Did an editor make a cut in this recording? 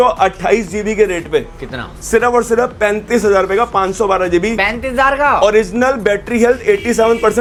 no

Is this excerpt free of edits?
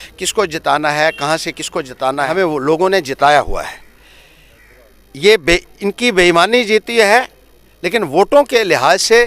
no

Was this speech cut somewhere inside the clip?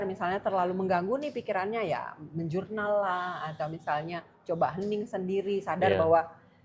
no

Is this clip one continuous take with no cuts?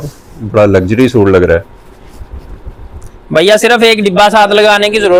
yes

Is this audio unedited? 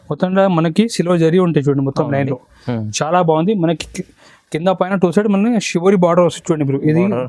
yes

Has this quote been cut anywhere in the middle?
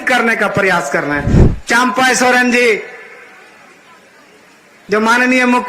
yes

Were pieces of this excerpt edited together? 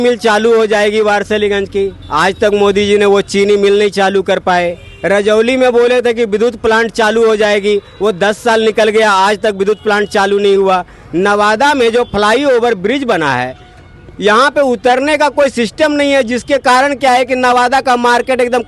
no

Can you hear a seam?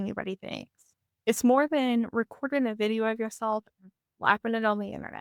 no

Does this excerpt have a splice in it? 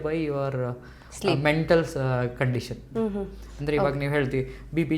no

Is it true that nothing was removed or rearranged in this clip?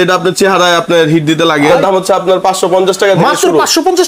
no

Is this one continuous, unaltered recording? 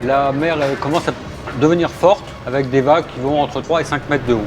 no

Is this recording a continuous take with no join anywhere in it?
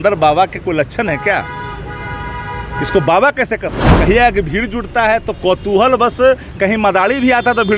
no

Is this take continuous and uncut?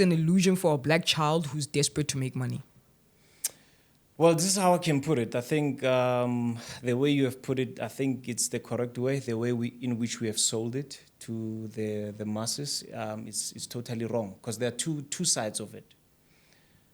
yes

